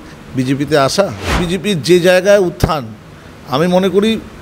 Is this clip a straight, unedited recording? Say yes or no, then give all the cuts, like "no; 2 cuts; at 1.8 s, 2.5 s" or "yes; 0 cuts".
no; 1 cut; at 1.4 s